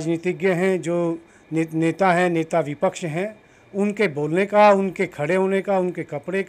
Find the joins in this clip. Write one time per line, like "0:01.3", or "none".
none